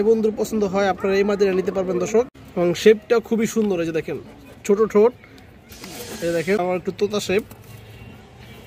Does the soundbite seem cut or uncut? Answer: cut